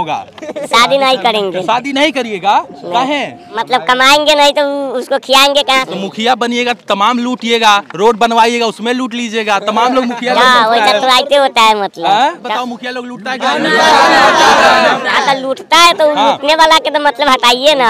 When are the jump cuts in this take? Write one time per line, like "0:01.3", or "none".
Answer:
0:03.6
0:05.8
0:12.4